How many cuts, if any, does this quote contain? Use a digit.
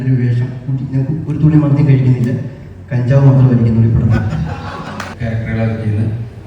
1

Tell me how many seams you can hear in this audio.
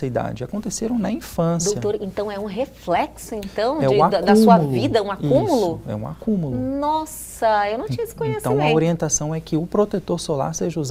0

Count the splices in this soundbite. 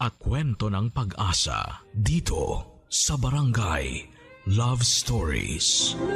0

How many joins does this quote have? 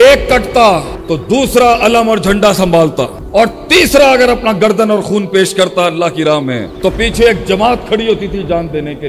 1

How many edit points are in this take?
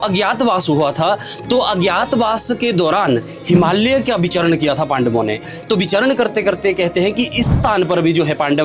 1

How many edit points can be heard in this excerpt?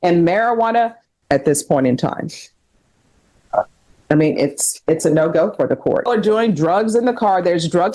2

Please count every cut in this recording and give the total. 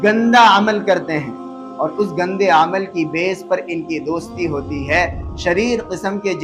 0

